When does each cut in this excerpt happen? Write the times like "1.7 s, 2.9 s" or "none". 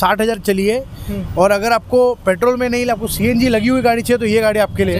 none

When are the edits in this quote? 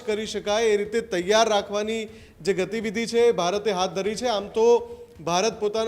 none

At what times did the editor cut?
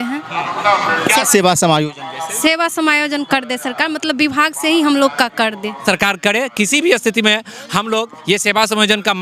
5.8 s

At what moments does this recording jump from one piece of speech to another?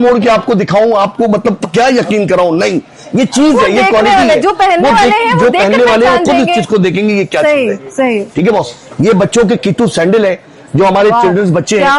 none

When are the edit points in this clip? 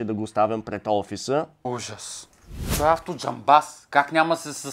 2.7 s

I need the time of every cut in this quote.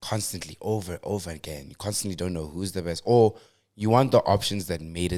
none

